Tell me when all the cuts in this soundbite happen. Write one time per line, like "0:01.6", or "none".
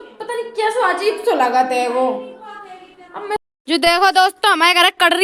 0:03.4